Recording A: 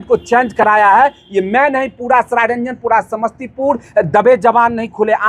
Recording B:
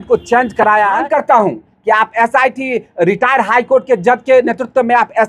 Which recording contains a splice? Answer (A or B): B